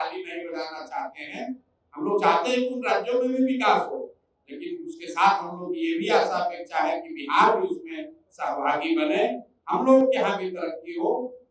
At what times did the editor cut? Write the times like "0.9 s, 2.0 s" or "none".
none